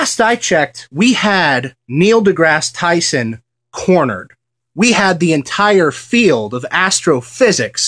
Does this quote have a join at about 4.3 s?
yes; 1 cut; at 4.3 s

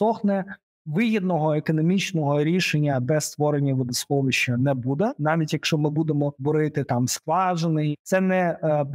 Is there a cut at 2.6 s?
no; 3 cuts; at 5.2 s, 6.4 s, 7.9 s

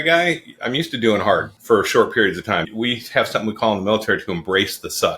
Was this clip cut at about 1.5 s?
yes; 1 cut; at 1.5 s

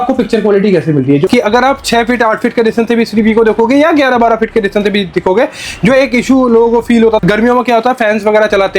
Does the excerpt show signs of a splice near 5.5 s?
no; 2 cuts; at 1.2 s, 7.2 s

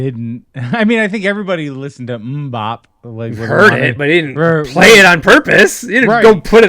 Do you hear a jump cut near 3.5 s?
yes; 1 cut; at 3.5 s

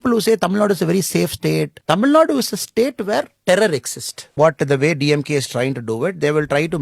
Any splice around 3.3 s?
yes; 3 cuts; at 1.8 s, 3.3 s, 4.4 s

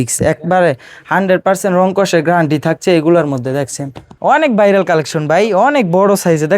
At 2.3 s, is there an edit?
no; 1 cut; at 4.1 s

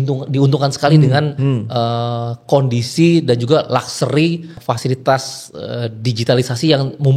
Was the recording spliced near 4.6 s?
yes; 1 cut; at 4.6 s

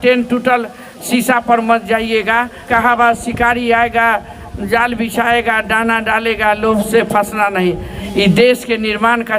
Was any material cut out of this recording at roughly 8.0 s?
yes; 2 cuts; at 2.6 s, 8.0 s

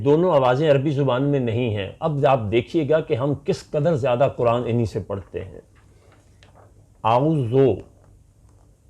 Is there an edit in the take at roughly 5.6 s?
no; 0 cuts

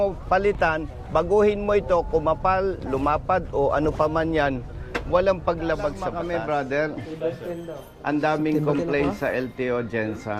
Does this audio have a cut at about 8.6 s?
no; 1 cut; at 6.1 s

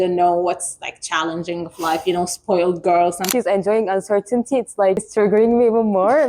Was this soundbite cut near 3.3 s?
yes; 2 cuts; at 3.3 s, 5.1 s

